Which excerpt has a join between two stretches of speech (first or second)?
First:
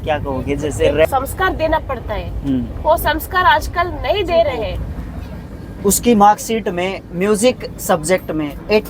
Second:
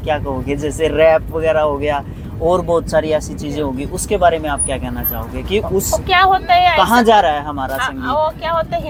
first